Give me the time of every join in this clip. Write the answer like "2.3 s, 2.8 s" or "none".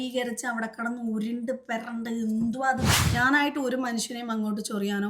2.9 s

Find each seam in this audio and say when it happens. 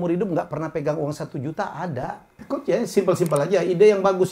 2.3 s

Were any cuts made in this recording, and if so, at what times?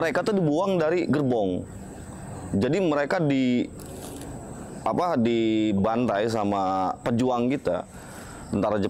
none

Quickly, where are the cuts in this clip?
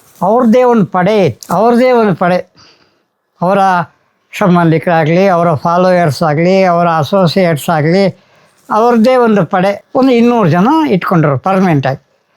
none

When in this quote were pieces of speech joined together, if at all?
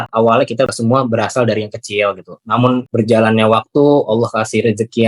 0.7 s, 2.9 s

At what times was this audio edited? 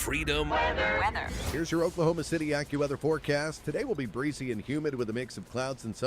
1.4 s

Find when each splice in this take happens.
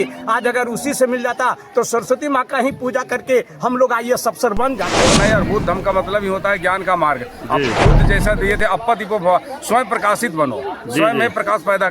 5.1 s

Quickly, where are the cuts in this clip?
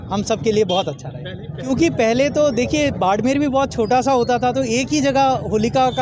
1.7 s

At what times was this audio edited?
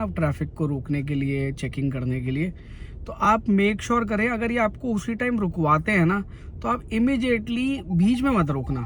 none

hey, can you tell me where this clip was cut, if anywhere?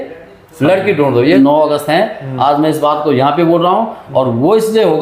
1.3 s

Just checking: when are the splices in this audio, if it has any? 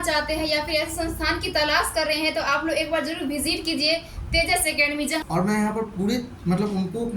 5.2 s

